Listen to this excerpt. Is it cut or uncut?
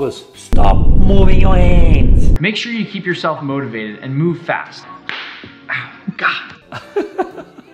cut